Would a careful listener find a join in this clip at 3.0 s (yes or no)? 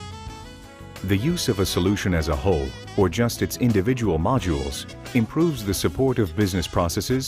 no